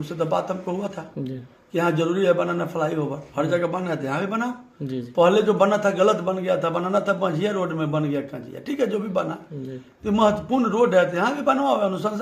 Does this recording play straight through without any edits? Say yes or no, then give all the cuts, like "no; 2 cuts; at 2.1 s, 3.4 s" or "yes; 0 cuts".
yes; 0 cuts